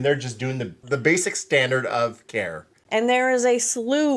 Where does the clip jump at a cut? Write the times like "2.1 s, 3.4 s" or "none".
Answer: 0.8 s, 2.7 s